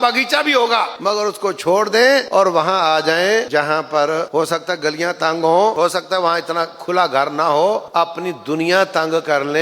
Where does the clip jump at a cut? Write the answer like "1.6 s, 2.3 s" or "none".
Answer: 0.9 s, 2.3 s, 3.5 s, 4.3 s, 5.7 s, 7.9 s